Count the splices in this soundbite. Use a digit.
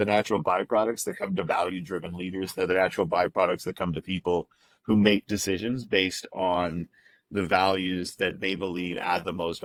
0